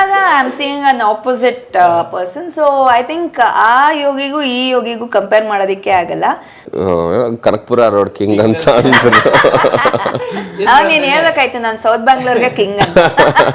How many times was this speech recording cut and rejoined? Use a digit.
1